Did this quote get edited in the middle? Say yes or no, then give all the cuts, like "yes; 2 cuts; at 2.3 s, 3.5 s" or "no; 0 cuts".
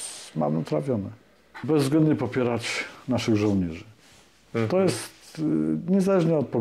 yes; 1 cut; at 1.6 s